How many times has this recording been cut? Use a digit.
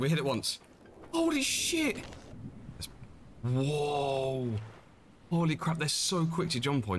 1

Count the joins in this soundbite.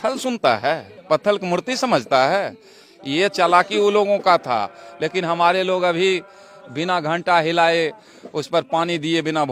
0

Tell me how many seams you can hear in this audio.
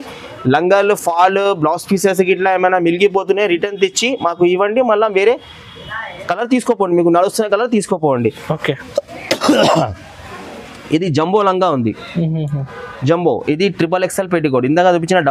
0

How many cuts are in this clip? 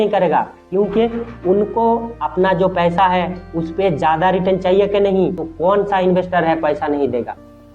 1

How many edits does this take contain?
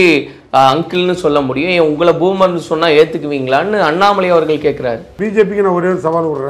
1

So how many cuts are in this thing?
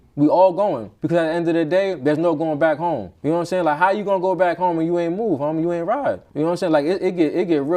2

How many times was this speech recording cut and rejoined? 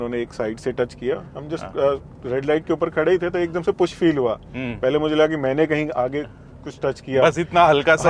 0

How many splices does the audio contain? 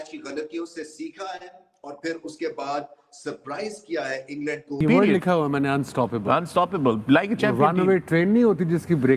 1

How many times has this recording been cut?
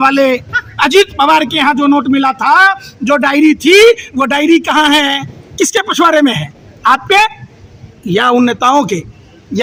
0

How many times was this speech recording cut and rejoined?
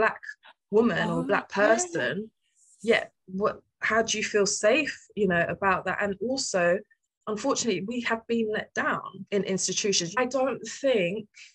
2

